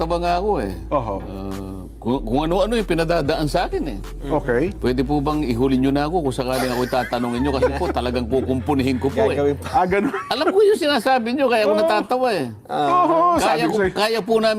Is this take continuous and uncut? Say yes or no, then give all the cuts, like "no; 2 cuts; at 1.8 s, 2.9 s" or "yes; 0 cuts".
yes; 0 cuts